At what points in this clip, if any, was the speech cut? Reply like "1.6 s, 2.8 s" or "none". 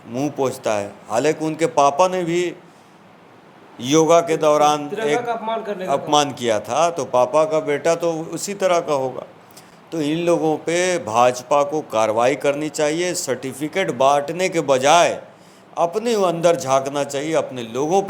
none